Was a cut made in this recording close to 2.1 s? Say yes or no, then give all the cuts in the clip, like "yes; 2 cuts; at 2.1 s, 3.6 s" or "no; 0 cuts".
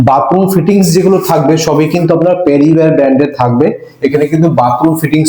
no; 0 cuts